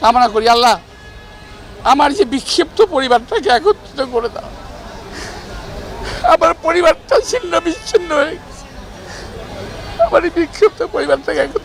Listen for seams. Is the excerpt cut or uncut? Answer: uncut